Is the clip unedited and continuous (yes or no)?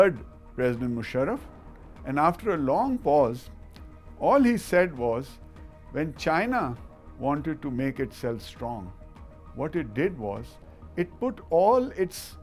yes